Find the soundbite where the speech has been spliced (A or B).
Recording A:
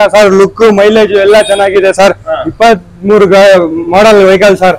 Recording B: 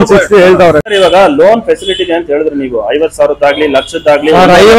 B